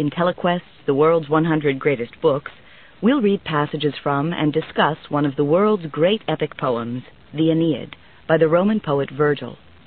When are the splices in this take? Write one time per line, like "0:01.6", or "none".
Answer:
none